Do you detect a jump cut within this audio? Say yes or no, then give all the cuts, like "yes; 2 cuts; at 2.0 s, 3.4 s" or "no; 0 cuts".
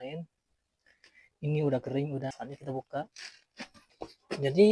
yes; 1 cut; at 3.8 s